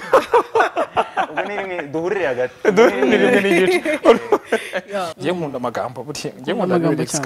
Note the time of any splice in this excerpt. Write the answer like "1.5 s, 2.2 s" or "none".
5.1 s